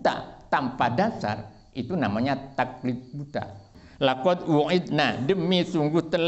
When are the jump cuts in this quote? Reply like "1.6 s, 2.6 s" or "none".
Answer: 3.8 s